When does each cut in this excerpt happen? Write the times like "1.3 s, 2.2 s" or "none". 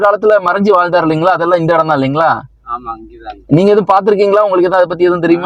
none